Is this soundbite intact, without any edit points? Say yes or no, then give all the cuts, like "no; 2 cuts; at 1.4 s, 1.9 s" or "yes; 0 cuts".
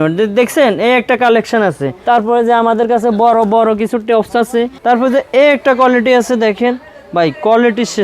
no; 2 cuts; at 1.9 s, 4.7 s